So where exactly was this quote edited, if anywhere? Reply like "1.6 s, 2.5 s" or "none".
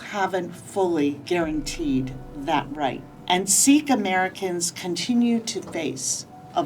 1.2 s, 3.1 s